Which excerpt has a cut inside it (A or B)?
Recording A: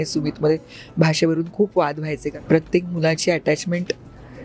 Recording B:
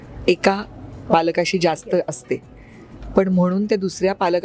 A